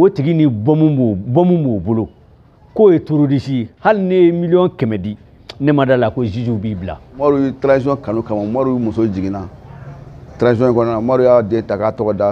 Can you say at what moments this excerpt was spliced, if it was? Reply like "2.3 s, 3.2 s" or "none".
7.1 s